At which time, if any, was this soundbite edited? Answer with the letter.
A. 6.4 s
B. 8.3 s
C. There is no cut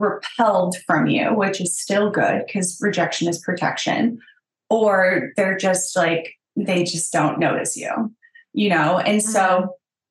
A